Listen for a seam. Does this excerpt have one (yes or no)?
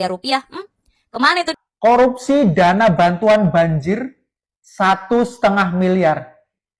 yes